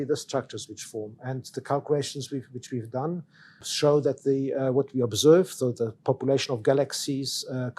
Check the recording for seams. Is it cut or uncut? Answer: cut